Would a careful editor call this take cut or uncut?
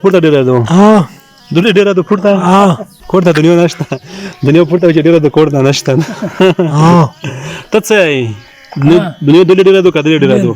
cut